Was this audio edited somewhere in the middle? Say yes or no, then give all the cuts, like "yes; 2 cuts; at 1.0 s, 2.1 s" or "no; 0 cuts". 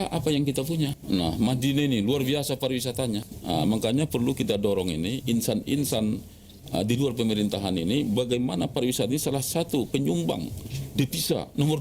yes; 2 cuts; at 0.9 s, 3.3 s